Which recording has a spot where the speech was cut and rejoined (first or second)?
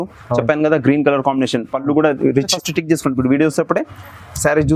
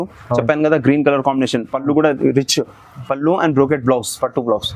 first